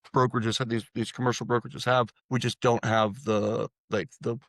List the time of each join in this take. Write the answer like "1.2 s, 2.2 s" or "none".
2.2 s